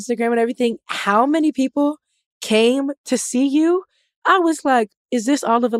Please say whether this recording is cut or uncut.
uncut